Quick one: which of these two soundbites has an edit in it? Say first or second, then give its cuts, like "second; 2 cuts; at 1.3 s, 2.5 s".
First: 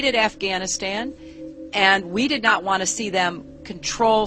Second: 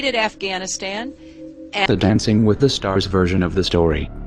first; 1 cut; at 1.9 s